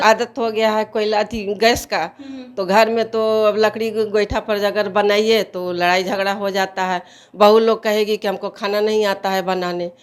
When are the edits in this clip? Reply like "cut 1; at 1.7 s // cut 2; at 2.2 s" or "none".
none